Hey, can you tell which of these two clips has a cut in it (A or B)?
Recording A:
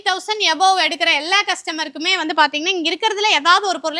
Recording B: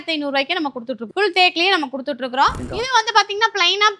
B